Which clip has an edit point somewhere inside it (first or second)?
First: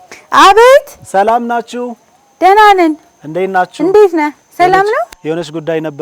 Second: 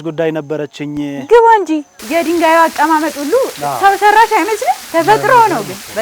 second